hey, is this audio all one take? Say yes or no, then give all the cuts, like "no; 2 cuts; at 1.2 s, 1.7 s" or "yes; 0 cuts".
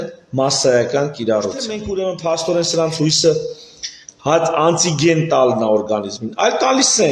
no; 1 cut; at 1.8 s